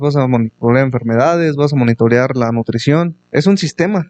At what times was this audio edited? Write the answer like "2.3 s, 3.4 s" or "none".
3.2 s